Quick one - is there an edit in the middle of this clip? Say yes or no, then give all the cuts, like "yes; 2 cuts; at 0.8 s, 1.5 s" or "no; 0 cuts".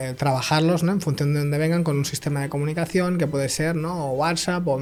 no; 0 cuts